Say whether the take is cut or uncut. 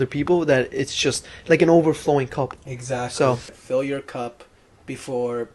cut